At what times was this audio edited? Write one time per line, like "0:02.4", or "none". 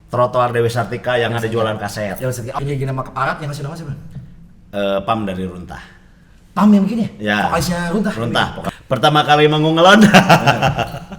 0:02.6
0:08.6